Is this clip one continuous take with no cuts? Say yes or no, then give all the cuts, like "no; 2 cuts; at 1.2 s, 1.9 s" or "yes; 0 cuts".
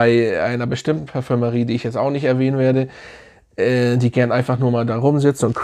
yes; 0 cuts